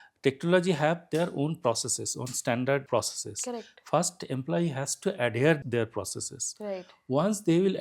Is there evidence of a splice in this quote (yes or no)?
yes